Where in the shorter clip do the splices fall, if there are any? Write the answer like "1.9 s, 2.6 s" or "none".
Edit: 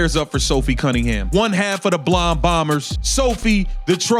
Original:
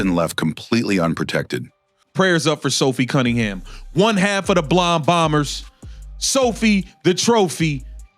1.2 s, 3.0 s